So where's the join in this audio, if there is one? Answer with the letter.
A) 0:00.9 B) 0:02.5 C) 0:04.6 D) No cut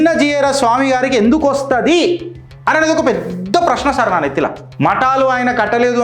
C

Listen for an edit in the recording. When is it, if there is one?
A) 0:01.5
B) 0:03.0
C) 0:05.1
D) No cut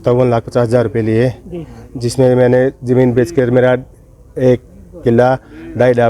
D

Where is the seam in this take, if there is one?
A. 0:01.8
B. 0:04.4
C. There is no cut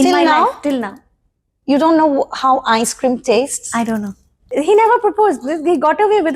B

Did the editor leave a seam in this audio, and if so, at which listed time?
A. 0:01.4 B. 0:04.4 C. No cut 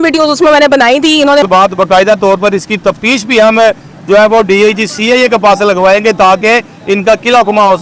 A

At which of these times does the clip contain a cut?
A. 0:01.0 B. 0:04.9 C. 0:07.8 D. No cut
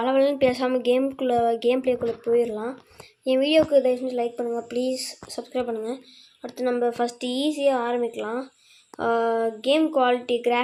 D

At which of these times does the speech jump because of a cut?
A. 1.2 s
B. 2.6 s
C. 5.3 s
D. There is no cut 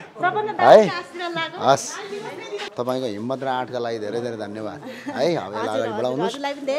B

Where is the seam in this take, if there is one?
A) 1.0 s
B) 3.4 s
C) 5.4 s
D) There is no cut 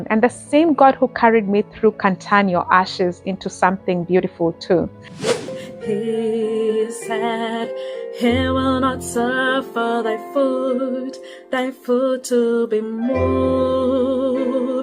C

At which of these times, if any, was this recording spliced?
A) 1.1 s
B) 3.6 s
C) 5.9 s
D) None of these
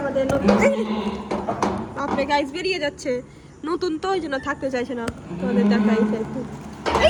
D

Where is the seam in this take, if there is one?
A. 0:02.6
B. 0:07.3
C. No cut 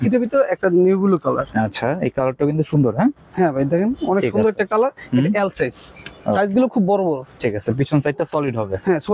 B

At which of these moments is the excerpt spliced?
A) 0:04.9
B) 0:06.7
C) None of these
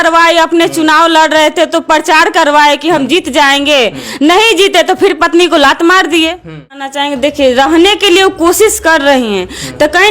B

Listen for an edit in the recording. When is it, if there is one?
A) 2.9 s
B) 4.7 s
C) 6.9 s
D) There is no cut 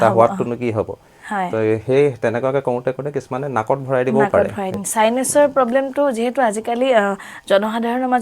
B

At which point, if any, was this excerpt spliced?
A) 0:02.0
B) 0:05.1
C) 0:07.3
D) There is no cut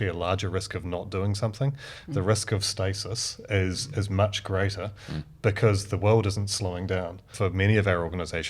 C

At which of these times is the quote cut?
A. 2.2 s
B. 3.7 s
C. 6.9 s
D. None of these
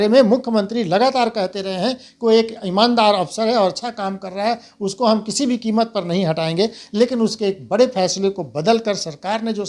D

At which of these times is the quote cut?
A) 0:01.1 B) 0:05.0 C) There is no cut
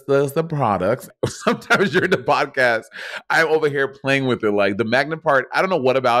A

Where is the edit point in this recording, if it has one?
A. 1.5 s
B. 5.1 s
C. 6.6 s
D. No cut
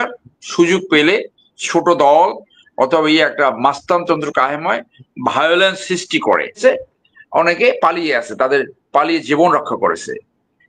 C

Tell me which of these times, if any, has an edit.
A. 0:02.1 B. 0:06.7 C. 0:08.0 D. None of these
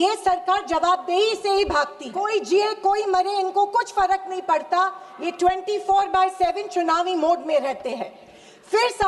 A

